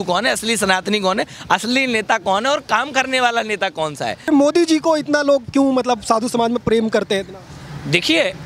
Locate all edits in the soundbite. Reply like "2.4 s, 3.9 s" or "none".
4.3 s